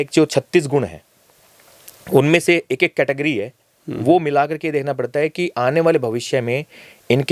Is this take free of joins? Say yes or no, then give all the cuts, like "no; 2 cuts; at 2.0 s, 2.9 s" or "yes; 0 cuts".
yes; 0 cuts